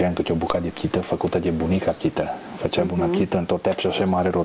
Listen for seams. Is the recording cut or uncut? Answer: uncut